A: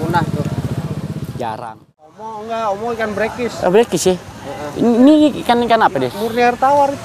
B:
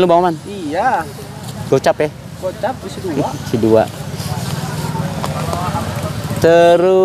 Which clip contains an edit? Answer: A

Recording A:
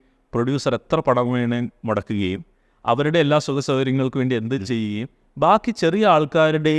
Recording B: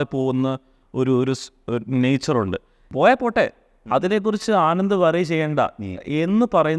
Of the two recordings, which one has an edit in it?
B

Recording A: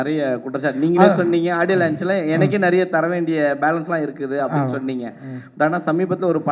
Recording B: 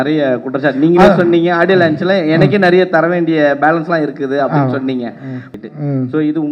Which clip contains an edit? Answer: B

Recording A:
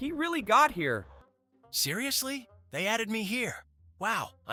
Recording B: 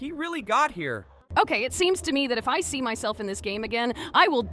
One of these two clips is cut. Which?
B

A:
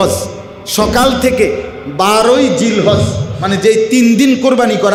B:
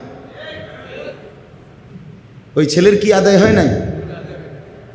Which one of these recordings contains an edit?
B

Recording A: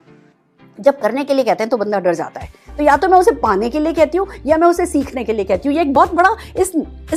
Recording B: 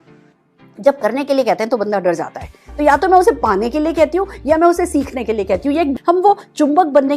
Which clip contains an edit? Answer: B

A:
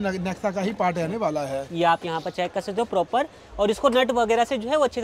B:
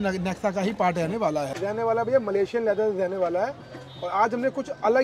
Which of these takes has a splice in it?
B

